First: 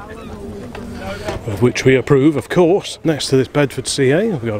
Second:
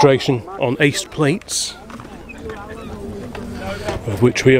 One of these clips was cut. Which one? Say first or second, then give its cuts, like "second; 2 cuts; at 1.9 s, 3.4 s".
first; 1 cut; at 2.9 s